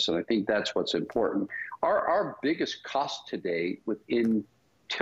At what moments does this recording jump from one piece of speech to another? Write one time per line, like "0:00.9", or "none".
0:01.6